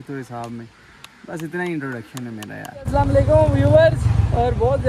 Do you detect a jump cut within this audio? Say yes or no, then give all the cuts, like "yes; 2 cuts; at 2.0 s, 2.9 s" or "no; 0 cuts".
yes; 1 cut; at 2.8 s